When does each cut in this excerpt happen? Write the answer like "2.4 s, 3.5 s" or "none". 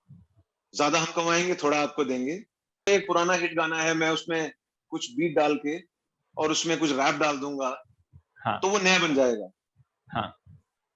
2.9 s